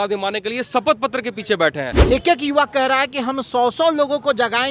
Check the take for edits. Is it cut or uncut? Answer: cut